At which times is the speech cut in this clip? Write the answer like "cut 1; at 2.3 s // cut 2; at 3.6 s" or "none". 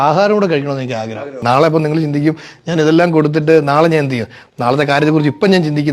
cut 1; at 1.4 s